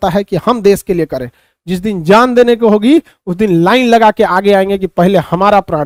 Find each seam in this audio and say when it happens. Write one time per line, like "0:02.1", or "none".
none